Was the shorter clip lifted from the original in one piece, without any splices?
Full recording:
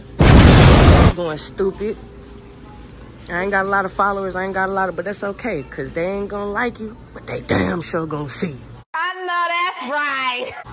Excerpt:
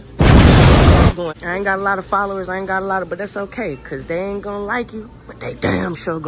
no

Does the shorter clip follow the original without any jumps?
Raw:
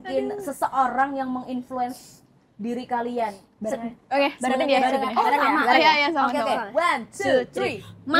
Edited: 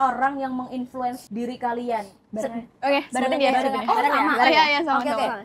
no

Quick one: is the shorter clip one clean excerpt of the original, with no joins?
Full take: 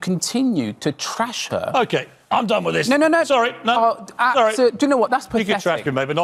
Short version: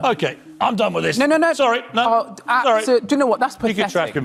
yes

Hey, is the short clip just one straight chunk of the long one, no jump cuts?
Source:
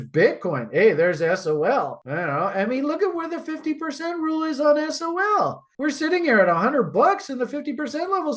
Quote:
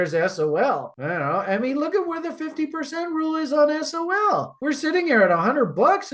no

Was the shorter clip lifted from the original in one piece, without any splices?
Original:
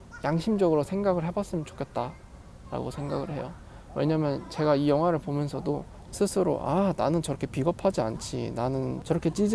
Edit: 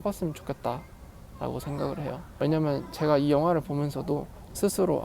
no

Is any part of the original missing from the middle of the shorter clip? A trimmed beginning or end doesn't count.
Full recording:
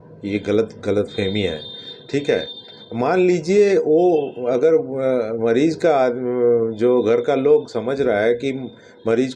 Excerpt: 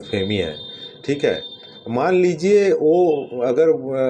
no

